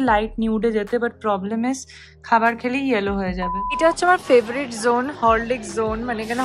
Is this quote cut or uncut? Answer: cut